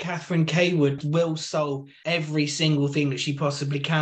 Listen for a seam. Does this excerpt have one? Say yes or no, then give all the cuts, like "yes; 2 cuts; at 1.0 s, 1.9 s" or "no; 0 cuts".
yes; 2 cuts; at 1.0 s, 1.9 s